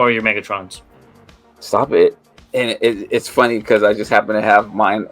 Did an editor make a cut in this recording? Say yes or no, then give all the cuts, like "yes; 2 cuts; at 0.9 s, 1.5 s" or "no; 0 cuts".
yes; 1 cut; at 2.3 s